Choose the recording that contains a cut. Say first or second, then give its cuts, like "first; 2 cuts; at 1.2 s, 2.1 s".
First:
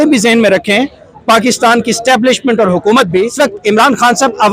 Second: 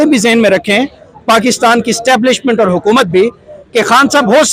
first; 1 cut; at 3.3 s